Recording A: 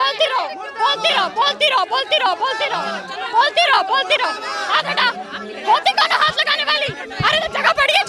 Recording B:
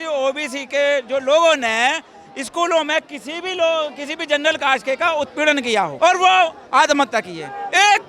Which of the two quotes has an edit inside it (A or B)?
B